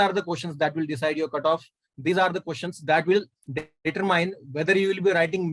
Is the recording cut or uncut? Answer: uncut